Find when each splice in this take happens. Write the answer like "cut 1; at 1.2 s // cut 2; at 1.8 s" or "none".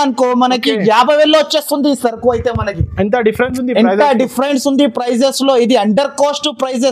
none